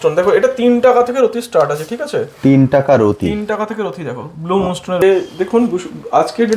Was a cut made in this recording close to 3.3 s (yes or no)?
no